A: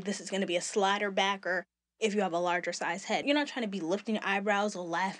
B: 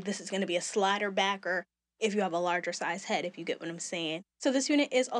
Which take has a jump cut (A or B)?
A